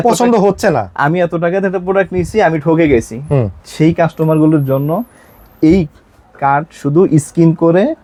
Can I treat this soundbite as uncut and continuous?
yes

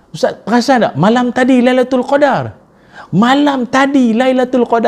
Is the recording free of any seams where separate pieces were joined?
yes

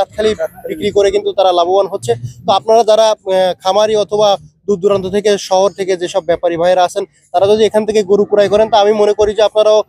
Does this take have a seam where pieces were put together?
no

